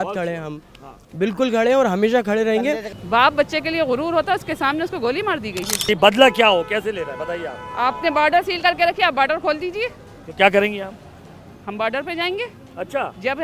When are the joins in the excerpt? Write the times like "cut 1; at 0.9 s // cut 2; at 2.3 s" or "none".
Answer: cut 1; at 2.9 s // cut 2; at 5.9 s